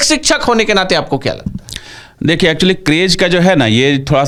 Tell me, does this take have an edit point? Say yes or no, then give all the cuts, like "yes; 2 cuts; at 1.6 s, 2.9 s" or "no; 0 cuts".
no; 0 cuts